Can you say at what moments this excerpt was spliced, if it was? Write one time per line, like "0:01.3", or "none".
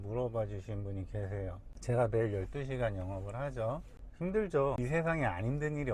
0:01.7
0:04.0
0:04.8